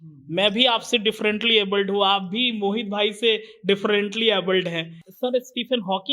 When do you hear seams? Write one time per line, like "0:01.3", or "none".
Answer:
0:05.0